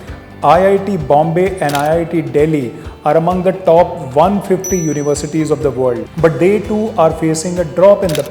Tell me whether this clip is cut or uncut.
cut